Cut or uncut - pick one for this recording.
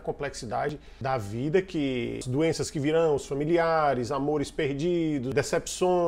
cut